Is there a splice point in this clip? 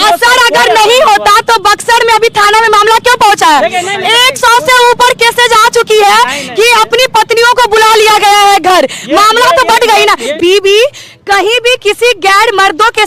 yes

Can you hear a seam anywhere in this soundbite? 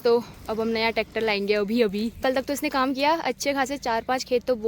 yes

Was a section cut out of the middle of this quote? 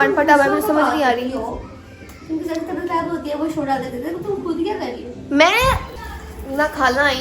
yes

